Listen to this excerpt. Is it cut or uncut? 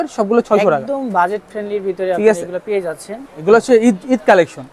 cut